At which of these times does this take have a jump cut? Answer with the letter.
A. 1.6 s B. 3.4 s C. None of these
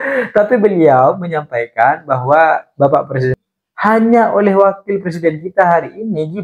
B